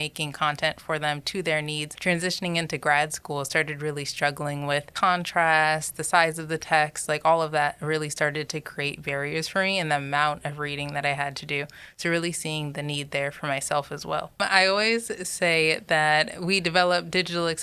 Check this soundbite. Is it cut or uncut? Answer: cut